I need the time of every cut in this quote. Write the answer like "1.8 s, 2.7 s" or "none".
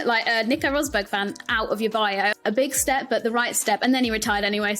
2.3 s